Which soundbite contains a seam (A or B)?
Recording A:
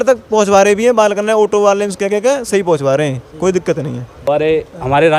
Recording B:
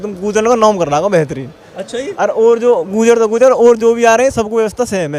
A